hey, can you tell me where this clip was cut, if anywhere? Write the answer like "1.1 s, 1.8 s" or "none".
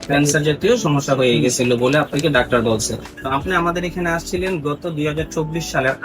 3.1 s